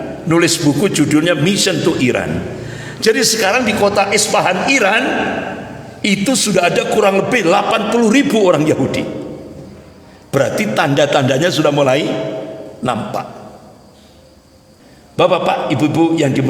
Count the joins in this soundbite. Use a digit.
1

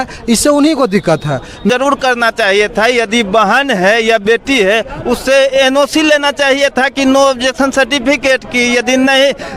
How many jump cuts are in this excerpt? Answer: 1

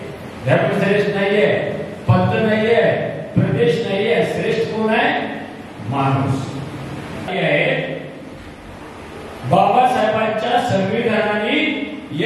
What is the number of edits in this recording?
1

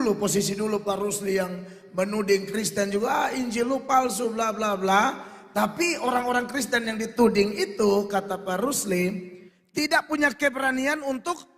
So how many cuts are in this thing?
0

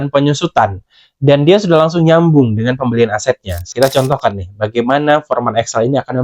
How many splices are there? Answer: 1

